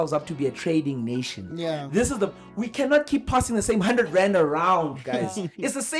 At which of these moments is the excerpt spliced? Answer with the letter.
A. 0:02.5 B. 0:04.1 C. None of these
C